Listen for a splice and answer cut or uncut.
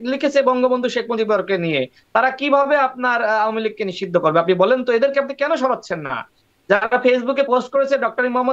uncut